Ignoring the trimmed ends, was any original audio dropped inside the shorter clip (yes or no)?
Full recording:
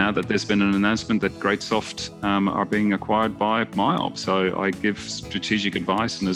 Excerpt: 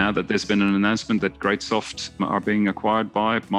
yes